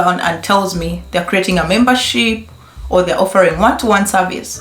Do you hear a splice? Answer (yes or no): no